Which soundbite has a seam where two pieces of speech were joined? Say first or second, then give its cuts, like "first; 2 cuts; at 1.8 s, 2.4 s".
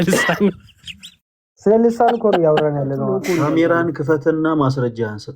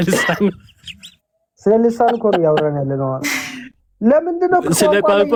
first; 1 cut; at 3.2 s